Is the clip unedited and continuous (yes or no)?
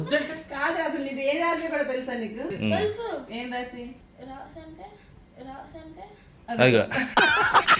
no